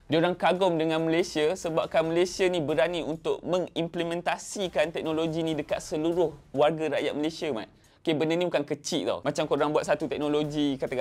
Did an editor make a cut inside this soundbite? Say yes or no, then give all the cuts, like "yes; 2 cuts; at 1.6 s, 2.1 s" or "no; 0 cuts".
no; 0 cuts